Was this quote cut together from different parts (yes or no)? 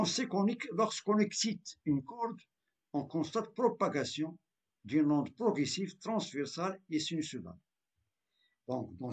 no